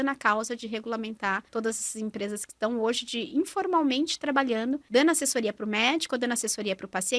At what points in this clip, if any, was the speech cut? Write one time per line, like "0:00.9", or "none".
0:01.4
0:04.8